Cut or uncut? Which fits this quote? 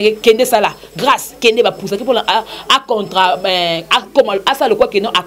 uncut